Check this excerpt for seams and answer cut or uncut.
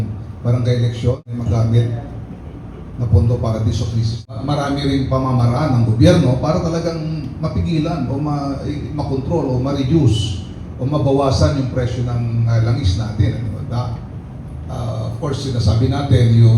cut